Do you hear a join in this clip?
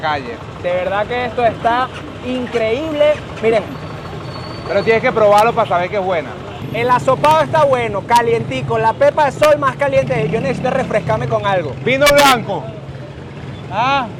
no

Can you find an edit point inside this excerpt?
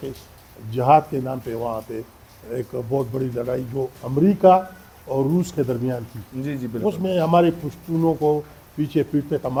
no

